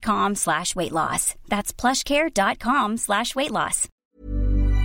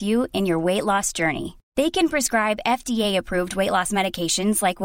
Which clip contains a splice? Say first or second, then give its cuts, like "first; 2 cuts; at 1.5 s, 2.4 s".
first; 1 cut; at 3.9 s